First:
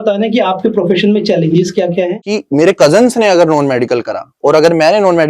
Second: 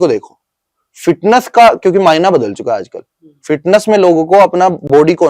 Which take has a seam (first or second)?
first